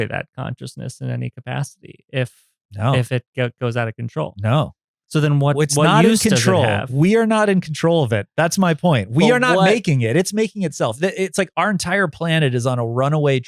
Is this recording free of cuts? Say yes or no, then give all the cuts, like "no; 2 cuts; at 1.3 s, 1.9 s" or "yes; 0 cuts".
yes; 0 cuts